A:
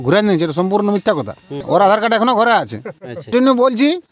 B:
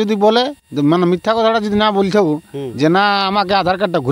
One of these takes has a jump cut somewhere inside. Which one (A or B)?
A